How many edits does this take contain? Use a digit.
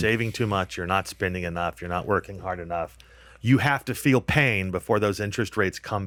0